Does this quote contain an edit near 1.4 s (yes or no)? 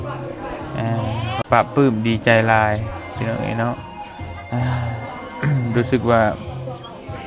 yes